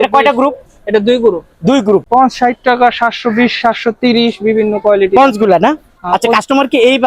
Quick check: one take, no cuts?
no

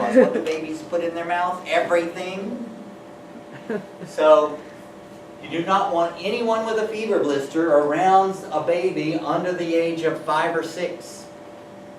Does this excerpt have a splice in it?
no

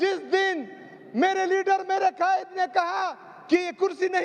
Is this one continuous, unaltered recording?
yes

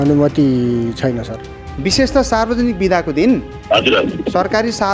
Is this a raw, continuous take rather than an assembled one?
no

